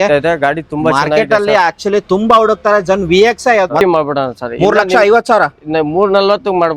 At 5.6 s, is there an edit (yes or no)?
no